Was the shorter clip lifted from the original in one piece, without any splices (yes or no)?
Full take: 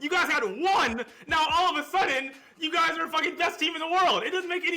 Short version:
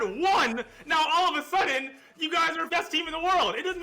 no